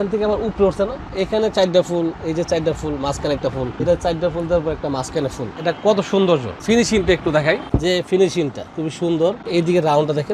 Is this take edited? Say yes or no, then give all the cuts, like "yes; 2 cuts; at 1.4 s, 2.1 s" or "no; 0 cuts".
yes; 7 cuts; at 1.1 s, 3.8 s, 5.5 s, 6.5 s, 7.6 s, 8.7 s, 9.4 s